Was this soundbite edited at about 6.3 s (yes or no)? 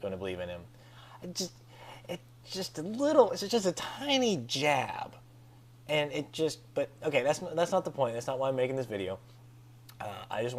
yes